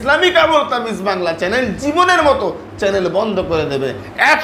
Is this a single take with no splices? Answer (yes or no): yes